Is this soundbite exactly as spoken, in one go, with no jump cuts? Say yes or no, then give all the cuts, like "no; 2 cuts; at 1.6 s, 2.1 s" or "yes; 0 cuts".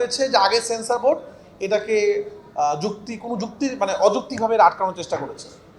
yes; 0 cuts